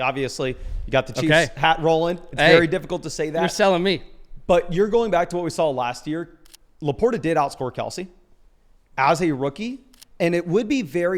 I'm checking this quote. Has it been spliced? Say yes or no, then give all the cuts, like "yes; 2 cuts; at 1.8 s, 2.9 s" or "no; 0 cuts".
no; 0 cuts